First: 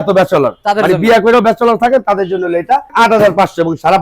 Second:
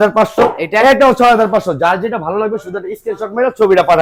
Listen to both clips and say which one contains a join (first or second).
first